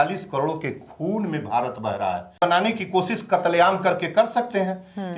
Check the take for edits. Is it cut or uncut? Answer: cut